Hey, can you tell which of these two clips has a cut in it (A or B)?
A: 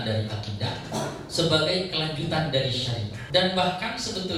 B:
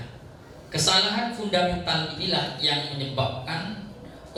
A